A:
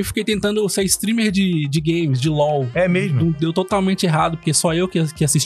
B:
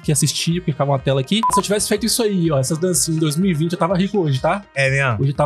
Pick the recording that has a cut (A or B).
B